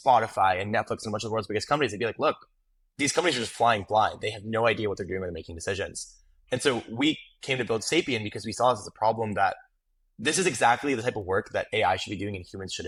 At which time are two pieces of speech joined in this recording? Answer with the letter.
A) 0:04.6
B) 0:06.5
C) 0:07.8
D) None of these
D